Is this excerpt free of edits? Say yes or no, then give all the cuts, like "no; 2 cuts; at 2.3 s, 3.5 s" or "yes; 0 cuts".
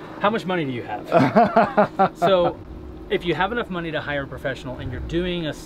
yes; 0 cuts